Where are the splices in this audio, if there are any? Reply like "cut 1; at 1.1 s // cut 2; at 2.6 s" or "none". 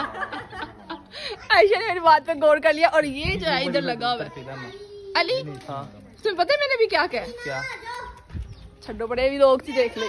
none